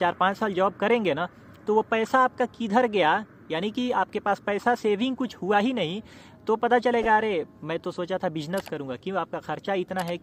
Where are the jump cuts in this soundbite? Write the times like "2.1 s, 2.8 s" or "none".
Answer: none